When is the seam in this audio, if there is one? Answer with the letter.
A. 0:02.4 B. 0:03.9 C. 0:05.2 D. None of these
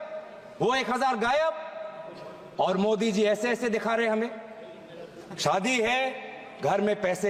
D